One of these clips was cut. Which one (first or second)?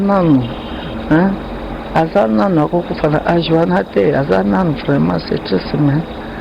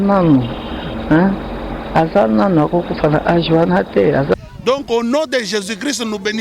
second